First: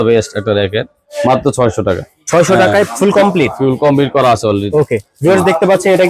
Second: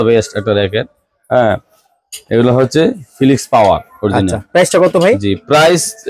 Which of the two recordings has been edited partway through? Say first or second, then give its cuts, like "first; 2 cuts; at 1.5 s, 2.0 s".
first; 1 cut; at 1.0 s